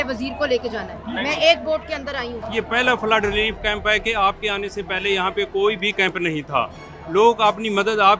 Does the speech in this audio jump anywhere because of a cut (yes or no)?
yes